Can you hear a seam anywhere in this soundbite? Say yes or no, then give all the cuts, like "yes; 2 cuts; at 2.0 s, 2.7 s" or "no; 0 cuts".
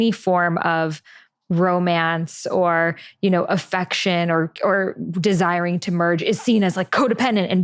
no; 0 cuts